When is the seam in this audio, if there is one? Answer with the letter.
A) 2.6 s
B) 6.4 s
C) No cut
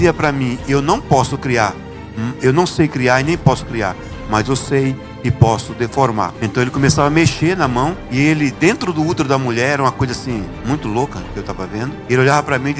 B